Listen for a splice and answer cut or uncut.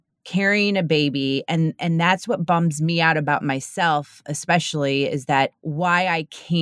cut